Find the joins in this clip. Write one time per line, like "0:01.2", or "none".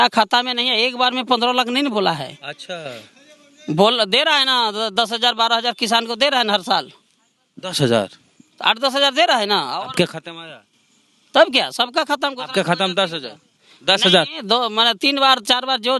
none